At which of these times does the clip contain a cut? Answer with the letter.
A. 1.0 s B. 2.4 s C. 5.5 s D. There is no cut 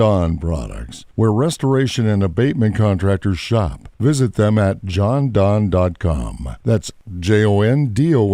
C